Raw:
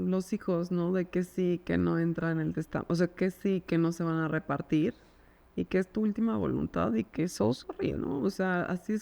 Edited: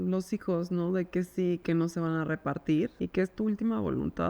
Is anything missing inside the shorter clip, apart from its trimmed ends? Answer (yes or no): yes